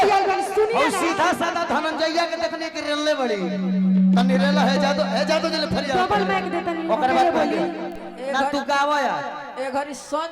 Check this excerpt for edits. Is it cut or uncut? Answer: uncut